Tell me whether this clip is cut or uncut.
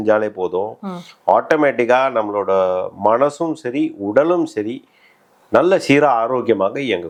uncut